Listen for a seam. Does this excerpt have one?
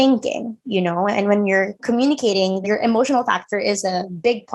yes; 2 cuts; at 1.8 s, 2.6 s

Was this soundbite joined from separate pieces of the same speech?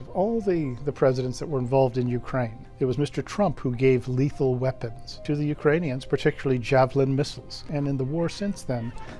yes; 3 cuts; at 2.6 s, 5.2 s, 7.6 s

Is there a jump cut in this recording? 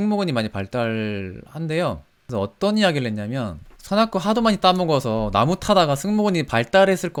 no; 0 cuts

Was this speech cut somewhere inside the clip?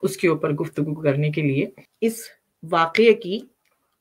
yes; 1 cut; at 1.8 s

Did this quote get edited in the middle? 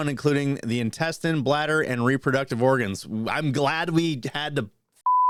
no; 0 cuts

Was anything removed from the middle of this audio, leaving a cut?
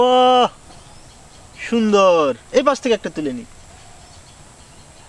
no; 0 cuts

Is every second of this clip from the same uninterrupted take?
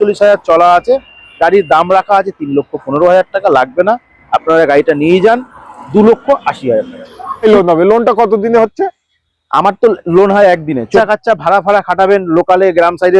no; 2 cuts; at 7.4 s, 10.9 s

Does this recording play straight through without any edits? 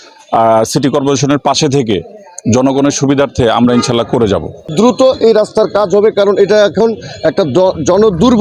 no; 1 cut; at 4.7 s

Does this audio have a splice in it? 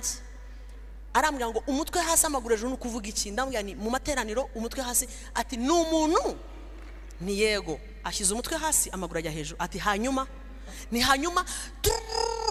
no; 0 cuts

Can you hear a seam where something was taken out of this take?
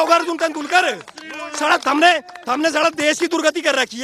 no; 0 cuts

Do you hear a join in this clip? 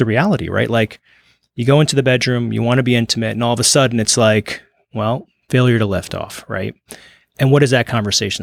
no; 0 cuts

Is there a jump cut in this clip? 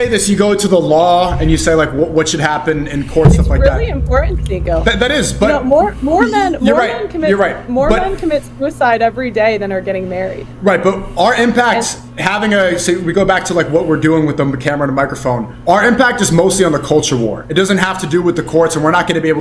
yes; 3 cuts; at 4.4 s, 15.5 s, 17.4 s

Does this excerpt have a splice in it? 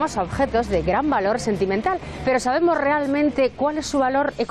no; 0 cuts

